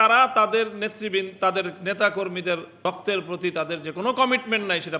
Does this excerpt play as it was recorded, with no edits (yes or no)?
no